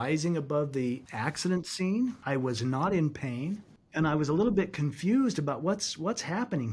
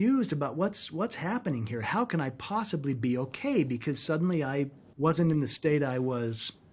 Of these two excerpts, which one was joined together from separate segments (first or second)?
first